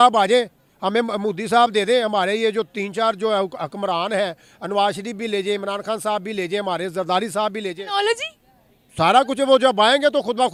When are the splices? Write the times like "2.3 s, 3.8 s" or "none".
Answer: none